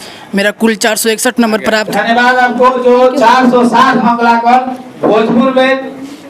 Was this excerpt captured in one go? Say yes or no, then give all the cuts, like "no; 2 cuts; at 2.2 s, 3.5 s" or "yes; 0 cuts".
no; 1 cut; at 1.9 s